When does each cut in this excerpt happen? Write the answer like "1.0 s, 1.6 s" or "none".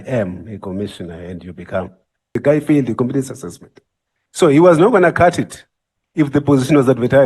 2.3 s